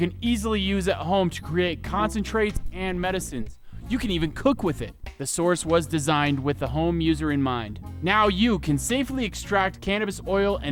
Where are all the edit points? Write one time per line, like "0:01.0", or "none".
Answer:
none